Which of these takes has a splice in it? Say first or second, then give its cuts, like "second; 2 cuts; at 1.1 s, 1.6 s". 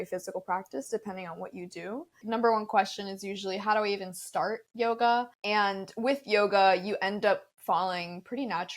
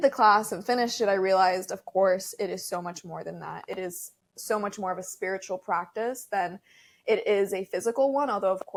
first; 2 cuts; at 2.2 s, 5.4 s